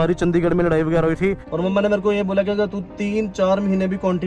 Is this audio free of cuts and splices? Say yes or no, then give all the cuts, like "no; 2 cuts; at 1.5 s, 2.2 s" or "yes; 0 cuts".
no; 1 cut; at 1.5 s